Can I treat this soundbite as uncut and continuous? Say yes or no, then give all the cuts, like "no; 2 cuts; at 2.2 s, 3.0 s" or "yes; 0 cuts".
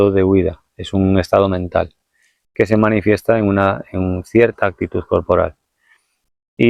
yes; 0 cuts